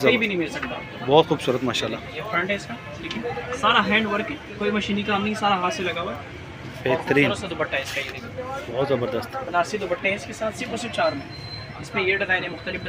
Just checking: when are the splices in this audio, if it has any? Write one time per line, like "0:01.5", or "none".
none